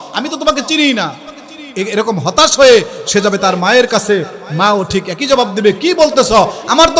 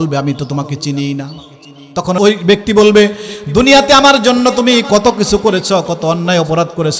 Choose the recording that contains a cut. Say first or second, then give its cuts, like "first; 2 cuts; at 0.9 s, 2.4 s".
second; 1 cut; at 2.2 s